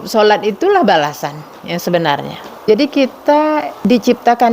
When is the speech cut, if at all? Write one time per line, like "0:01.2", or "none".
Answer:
0:02.7
0:03.7

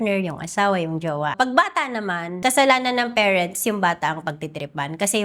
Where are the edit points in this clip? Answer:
0:01.3
0:02.3

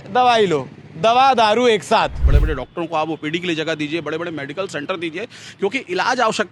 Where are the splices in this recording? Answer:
0:02.3

